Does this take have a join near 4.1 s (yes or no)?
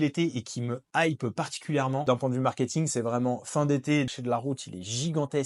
yes